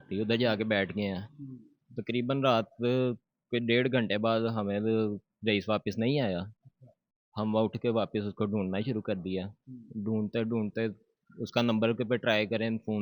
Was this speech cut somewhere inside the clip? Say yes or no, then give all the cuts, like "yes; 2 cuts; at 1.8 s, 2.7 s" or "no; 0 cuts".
no; 0 cuts